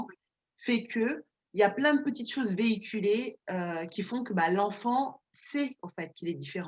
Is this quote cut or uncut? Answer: uncut